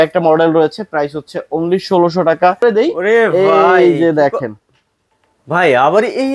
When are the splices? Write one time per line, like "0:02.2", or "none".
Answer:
0:02.6